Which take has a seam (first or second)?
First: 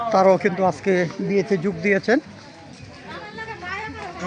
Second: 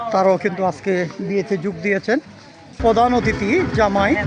second